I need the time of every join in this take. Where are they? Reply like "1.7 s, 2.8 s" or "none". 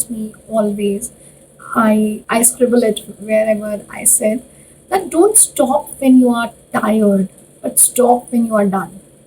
2.2 s